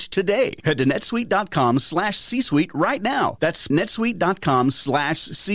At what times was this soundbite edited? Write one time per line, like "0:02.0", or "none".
0:03.7